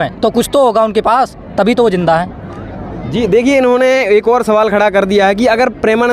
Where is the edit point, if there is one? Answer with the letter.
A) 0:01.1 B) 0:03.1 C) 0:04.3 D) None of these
D